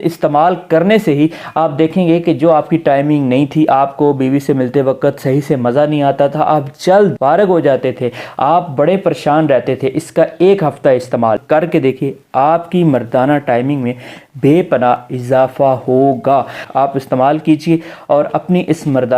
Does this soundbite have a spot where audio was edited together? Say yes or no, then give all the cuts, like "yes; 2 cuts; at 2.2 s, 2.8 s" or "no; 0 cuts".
yes; 3 cuts; at 7.1 s, 11.4 s, 16.6 s